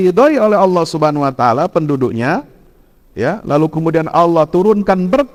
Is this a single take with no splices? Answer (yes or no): yes